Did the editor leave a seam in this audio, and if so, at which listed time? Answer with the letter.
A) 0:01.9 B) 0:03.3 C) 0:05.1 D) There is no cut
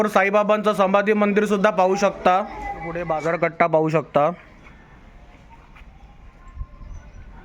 B